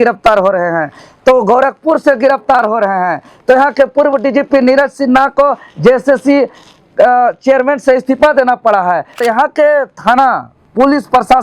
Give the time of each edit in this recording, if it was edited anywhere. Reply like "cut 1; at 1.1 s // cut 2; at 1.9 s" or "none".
cut 1; at 9.2 s